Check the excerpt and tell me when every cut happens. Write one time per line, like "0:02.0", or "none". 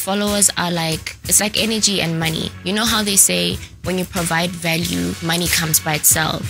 none

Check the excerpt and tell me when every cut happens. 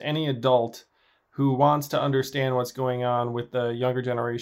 none

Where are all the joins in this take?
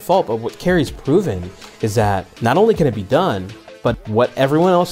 0:02.3
0:03.9

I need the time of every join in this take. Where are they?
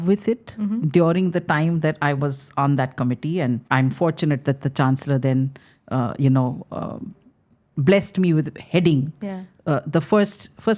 0:03.6

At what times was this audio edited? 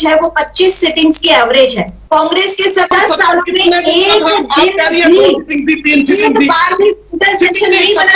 0:02.0
0:02.9

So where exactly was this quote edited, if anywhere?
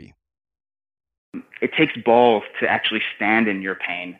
0:01.5

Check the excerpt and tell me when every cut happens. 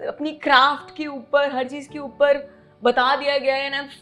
none

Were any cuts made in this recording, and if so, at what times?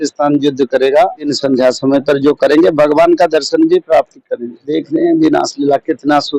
0:01.3
0:04.7

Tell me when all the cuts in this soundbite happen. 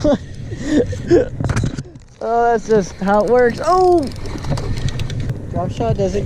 0:05.3

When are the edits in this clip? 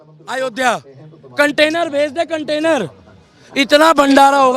none

